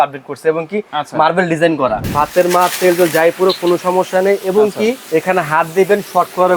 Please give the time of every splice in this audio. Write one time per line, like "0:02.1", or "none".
0:02.0
0:05.0